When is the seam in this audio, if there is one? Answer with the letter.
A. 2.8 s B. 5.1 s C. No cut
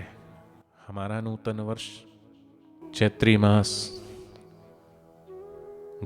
A